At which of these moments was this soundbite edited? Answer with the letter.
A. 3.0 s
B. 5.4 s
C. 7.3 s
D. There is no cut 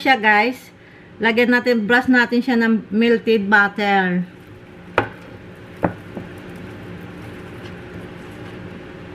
C